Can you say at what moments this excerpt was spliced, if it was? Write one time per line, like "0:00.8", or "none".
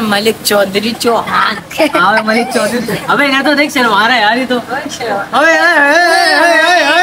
none